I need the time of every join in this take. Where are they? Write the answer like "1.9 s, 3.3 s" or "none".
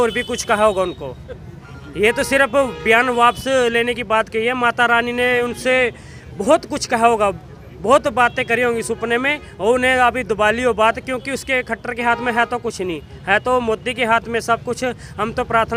none